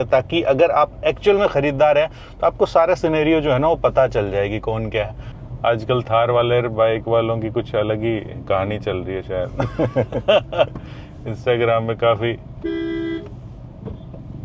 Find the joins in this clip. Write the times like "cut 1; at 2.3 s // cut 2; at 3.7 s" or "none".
cut 1; at 5.3 s